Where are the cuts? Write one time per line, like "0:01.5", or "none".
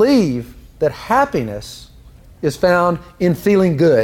none